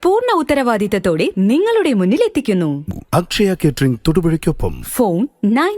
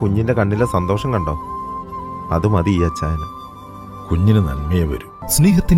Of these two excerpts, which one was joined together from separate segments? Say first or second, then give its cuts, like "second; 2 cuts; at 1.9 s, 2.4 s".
first; 1 cut; at 2.8 s